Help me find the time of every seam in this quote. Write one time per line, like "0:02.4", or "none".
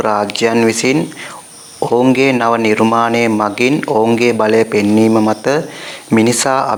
none